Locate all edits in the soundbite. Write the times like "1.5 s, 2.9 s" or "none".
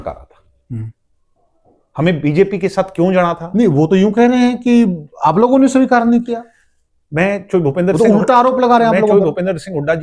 none